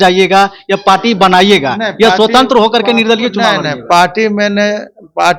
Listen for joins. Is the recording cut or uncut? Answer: uncut